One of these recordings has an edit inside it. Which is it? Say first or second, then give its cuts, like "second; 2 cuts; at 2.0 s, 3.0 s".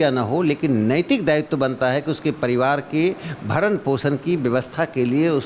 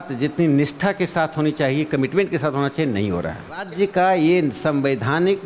second; 1 cut; at 3.7 s